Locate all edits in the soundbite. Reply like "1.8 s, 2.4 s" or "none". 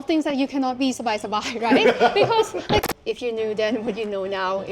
2.8 s